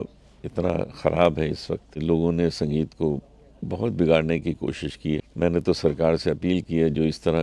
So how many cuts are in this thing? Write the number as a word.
two